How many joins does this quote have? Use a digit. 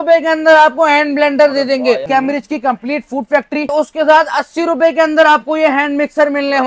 2